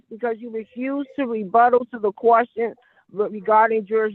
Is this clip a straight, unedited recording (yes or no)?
yes